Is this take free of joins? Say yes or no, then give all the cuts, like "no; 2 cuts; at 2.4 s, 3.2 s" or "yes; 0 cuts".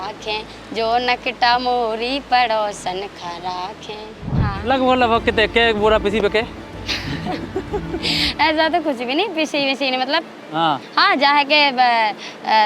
no; 1 cut; at 4.4 s